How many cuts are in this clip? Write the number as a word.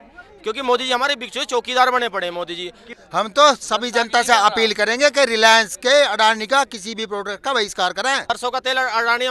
two